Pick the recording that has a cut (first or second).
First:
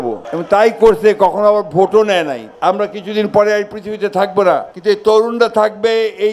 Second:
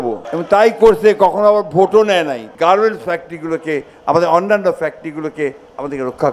first